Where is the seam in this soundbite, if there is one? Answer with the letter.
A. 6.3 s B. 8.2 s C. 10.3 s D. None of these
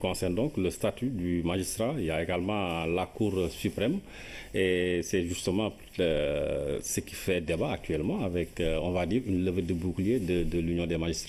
A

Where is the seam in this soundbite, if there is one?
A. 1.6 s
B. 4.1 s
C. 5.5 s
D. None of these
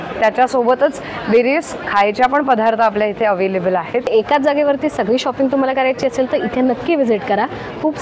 B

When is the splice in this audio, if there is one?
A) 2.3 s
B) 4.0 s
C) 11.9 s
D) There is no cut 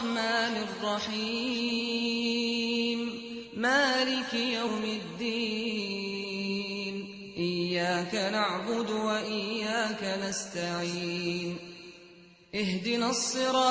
B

